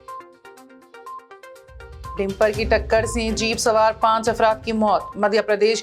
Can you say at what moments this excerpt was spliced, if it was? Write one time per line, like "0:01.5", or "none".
0:02.0

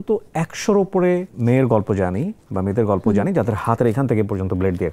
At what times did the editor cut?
0:01.3

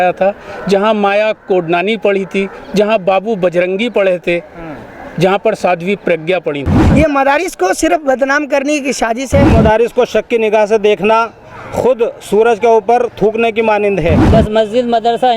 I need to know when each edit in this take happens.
0:06.8
0:09.5
0:14.2

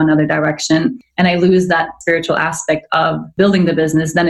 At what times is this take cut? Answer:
0:01.0
0:02.0
0:03.3

